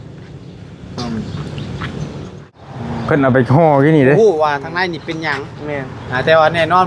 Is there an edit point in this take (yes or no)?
yes